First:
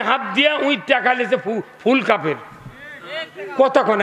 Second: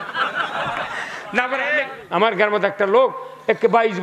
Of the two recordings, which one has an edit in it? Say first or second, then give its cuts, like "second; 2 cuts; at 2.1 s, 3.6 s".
second; 1 cut; at 1.7 s